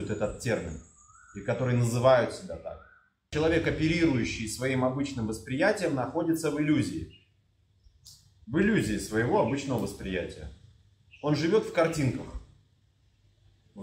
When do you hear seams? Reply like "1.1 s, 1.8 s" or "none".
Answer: 3.3 s